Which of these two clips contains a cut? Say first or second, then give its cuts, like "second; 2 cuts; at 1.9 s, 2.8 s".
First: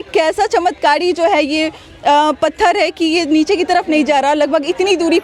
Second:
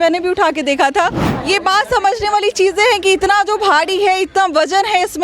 second; 1 cut; at 1.3 s